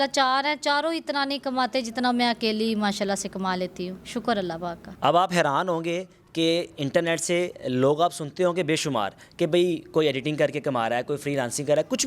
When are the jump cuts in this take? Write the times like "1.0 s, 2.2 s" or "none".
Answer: none